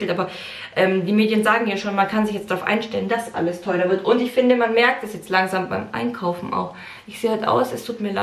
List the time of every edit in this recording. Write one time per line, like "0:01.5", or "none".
none

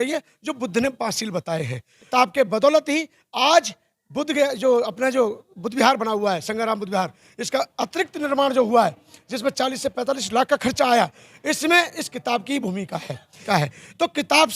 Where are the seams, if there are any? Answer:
0:02.1
0:13.4

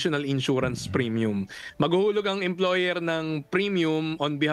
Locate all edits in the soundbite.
none

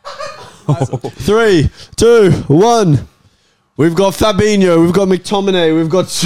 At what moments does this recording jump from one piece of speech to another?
0:01.1

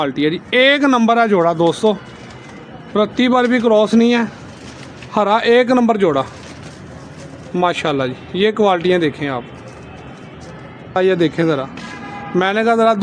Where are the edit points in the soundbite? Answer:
none

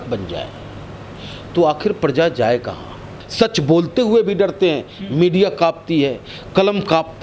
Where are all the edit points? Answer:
0:03.2

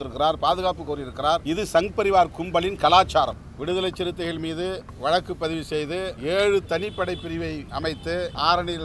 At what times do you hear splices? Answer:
0:01.4
0:03.5
0:04.9
0:06.2
0:07.8

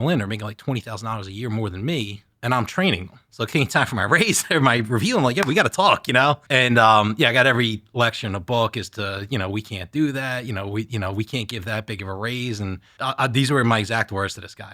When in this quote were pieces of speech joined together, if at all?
0:03.2
0:06.4
0:12.9

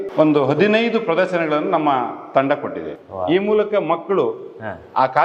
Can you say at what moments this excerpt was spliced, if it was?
none

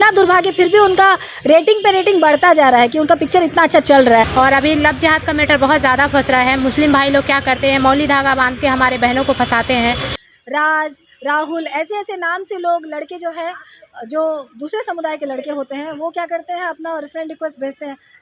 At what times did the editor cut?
0:04.3
0:10.1

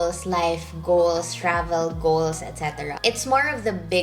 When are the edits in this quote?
none

